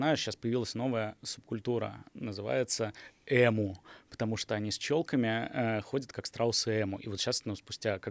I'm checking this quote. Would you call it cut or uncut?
uncut